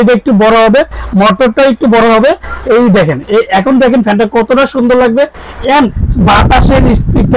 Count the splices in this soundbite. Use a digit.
0